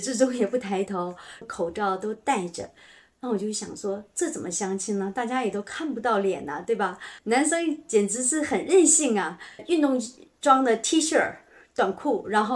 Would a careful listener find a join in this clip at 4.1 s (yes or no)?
no